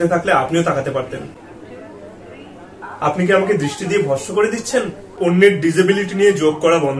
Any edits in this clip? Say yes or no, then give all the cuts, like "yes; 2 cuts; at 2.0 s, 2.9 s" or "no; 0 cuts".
yes; 2 cuts; at 1.4 s, 5.0 s